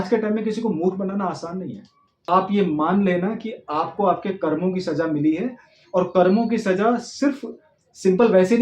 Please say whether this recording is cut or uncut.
cut